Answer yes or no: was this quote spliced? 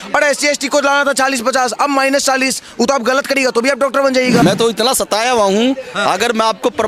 yes